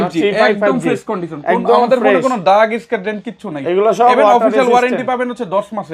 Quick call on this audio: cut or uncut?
uncut